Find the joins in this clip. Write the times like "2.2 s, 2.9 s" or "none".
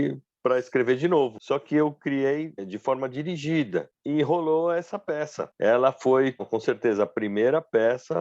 1.4 s, 2.7 s, 3.9 s, 5.4 s